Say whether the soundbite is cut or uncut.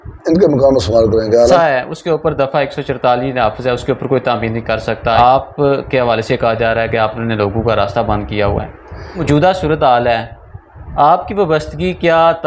cut